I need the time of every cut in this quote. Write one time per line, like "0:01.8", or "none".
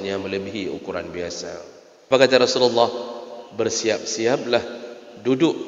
0:02.1